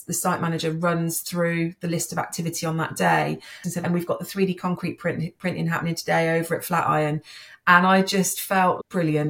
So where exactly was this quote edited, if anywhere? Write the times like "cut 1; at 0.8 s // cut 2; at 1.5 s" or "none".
cut 1; at 3.6 s